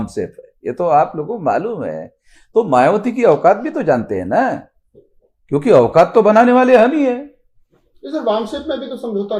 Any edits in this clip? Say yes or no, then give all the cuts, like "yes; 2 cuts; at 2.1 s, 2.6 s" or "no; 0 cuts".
no; 0 cuts